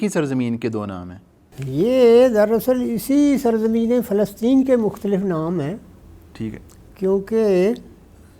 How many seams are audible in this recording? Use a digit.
0